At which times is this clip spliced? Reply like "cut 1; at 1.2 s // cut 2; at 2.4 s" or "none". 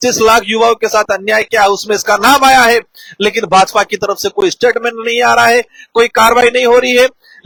none